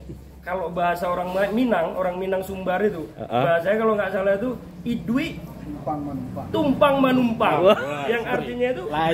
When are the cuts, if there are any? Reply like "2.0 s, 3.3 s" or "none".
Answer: none